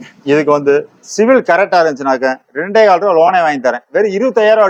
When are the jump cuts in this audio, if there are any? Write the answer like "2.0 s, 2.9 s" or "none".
none